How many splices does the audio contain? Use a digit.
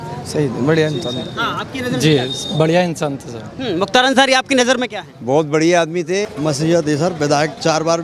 1